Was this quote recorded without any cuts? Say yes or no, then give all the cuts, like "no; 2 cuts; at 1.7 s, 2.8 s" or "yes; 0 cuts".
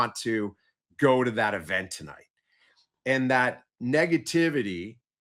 yes; 0 cuts